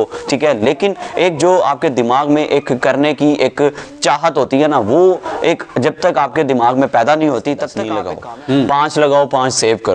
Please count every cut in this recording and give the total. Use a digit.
1